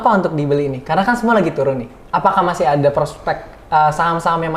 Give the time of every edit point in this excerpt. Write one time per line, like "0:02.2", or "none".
none